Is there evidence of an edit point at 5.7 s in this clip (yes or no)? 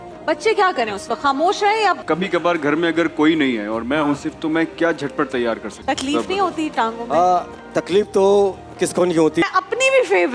yes